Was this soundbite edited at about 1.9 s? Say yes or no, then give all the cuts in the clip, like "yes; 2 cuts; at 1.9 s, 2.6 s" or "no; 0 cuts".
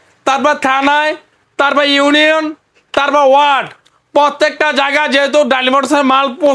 no; 0 cuts